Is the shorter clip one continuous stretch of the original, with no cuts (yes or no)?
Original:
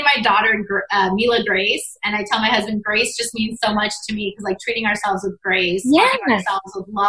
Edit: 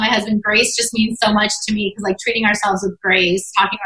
yes